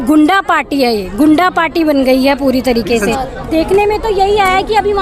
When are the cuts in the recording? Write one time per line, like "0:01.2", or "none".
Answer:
0:03.2